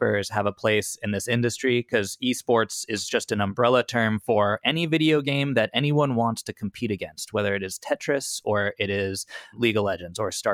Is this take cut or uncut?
cut